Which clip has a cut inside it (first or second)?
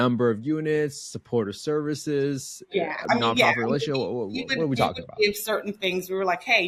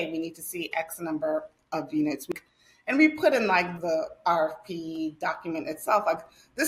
second